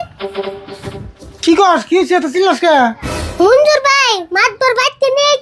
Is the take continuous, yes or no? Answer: yes